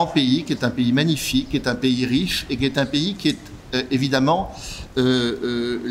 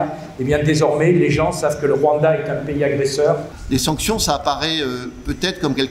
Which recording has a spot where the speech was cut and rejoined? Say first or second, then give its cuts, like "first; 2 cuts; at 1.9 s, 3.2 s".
second; 1 cut; at 3.5 s